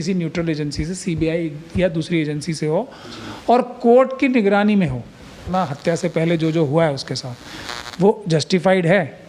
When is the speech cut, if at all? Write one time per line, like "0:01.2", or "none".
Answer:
0:05.5